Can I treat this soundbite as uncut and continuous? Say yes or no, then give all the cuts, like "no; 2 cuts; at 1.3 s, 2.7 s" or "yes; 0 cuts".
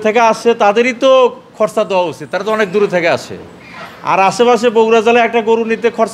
yes; 0 cuts